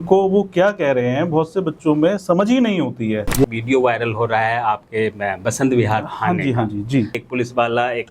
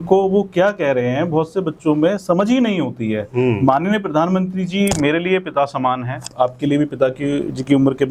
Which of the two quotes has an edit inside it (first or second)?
first